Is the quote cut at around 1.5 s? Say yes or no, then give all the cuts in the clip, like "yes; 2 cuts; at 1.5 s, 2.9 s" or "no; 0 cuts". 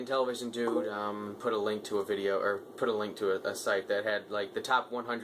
no; 1 cut; at 3.7 s